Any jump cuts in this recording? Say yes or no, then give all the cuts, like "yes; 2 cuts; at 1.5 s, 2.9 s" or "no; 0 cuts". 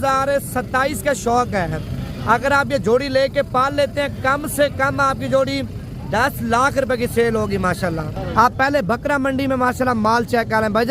no; 0 cuts